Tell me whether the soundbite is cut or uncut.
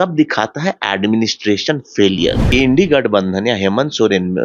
cut